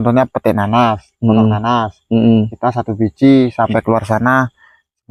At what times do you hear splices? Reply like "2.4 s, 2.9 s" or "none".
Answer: none